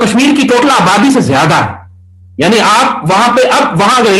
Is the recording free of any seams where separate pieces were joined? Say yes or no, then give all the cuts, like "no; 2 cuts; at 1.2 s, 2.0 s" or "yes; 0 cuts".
yes; 0 cuts